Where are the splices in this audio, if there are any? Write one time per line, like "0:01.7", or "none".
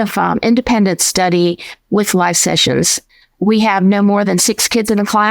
0:03.0